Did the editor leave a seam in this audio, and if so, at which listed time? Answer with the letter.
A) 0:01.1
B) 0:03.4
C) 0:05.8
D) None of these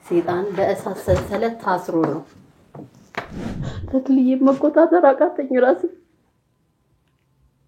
B